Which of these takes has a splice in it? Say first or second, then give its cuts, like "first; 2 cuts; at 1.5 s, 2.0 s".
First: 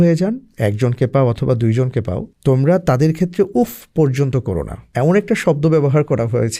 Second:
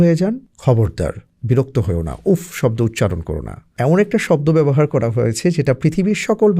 second; 2 cuts; at 0.8 s, 3.6 s